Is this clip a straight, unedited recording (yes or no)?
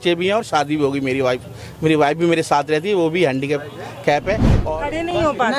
no